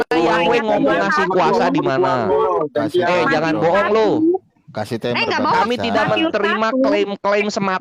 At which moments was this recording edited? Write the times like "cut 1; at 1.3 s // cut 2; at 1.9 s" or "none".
none